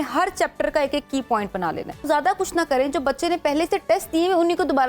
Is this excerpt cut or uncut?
cut